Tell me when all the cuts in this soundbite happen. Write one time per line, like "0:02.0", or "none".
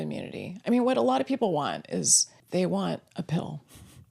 0:02.3